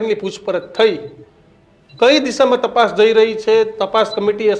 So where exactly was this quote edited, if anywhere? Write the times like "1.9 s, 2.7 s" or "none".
none